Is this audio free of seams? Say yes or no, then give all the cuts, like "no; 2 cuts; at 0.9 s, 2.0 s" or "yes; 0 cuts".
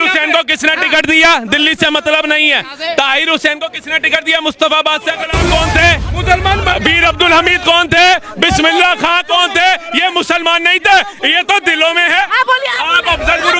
no; 1 cut; at 5.3 s